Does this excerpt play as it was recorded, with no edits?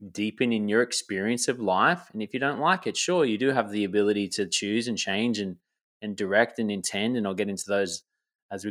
yes; 0 cuts

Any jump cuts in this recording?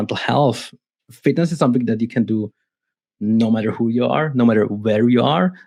no; 0 cuts

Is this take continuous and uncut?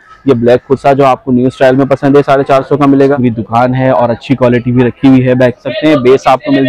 no; 2 cuts; at 3.2 s, 5.6 s

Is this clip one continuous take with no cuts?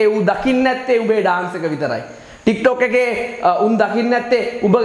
yes; 0 cuts

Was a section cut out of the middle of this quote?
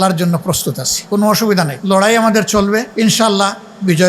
yes; 3 cuts; at 0.9 s, 1.8 s, 2.9 s

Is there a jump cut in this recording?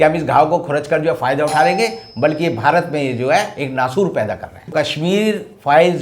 yes; 1 cut; at 4.7 s

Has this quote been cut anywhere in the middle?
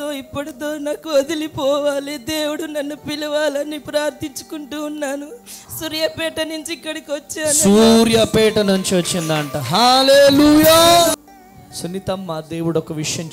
yes; 1 cut; at 11.1 s

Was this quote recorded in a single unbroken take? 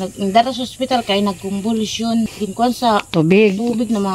no; 1 cut; at 2.3 s

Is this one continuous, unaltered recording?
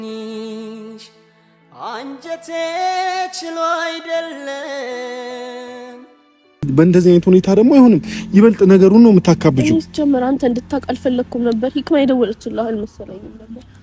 no; 1 cut; at 6.7 s

